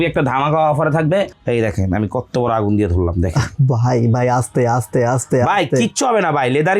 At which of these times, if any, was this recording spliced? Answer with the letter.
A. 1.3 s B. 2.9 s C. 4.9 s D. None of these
A